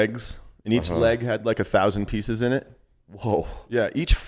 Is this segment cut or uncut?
uncut